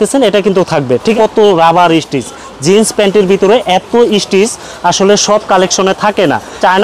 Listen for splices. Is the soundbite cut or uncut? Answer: uncut